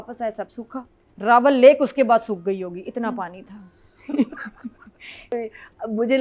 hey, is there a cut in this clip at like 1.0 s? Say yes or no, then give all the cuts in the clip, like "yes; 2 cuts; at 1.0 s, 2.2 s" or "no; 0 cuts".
yes; 2 cuts; at 1.0 s, 5.3 s